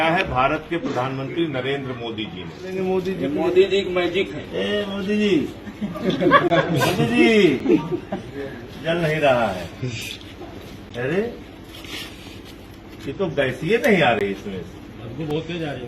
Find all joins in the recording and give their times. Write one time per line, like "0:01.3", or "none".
0:02.7